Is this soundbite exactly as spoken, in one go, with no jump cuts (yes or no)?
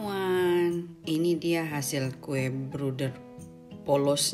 yes